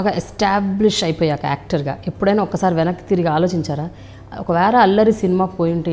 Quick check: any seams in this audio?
no; 0 cuts

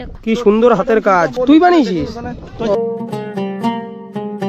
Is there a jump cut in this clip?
yes; 1 cut; at 2.7 s

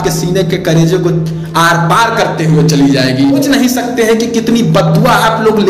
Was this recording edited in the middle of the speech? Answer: yes; 1 cut; at 3.4 s

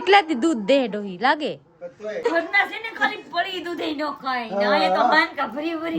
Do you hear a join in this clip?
yes; 1 cut; at 2.2 s

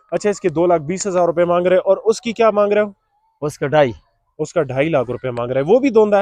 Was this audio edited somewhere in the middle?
no; 0 cuts

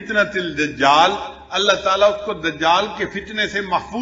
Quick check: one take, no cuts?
yes; 0 cuts

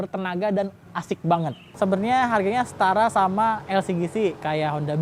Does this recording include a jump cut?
yes; 1 cut; at 1.6 s

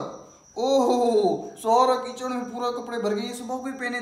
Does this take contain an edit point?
no; 0 cuts

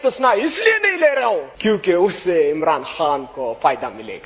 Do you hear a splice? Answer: yes; 1 cut; at 1.5 s

